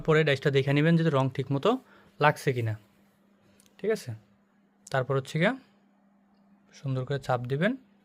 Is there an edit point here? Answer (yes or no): no